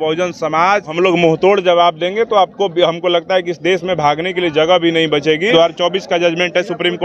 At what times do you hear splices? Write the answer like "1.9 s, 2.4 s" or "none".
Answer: 0.9 s, 5.5 s